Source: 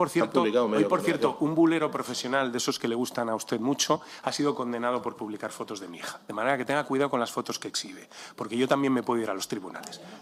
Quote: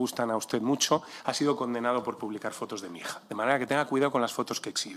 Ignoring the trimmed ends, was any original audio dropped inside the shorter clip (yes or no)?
no